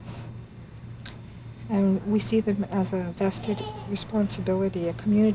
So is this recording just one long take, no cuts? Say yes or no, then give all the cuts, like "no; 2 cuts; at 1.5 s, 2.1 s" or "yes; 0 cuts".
no; 1 cut; at 3.6 s